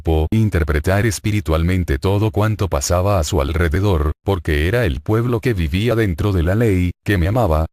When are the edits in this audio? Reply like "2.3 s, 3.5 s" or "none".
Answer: 1.4 s